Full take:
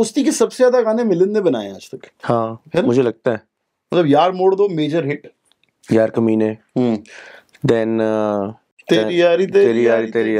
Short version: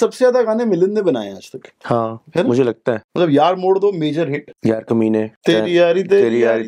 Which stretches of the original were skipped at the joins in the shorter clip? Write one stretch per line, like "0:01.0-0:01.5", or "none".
0:03.4-0:03.8
0:05.2-0:05.7
0:06.6-0:08.8